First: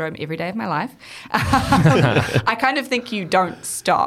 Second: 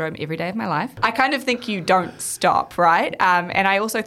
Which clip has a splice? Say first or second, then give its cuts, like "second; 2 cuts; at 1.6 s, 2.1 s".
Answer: second; 1 cut; at 1.0 s